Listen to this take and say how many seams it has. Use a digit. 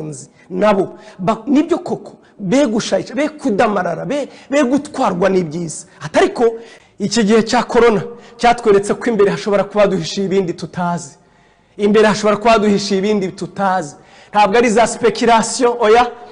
1